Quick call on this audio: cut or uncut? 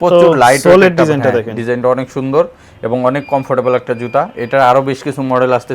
uncut